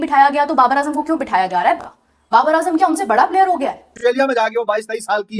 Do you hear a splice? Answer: yes; 1 cut; at 3.9 s

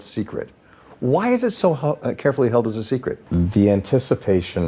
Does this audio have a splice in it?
yes; 1 cut; at 3.2 s

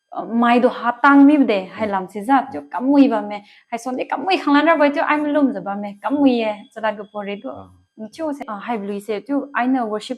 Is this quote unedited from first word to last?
no; 1 cut; at 8.5 s

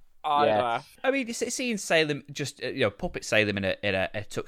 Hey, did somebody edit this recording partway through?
yes; 1 cut; at 0.9 s

